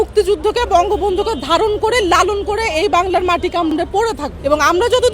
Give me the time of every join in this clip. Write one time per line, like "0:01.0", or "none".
0:03.8